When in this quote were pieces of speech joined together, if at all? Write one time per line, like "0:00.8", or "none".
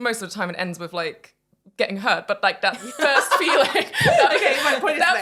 none